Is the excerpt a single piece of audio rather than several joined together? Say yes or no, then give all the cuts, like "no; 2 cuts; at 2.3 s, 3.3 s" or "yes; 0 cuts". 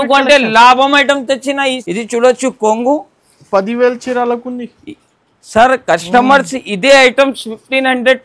no; 1 cut; at 1.8 s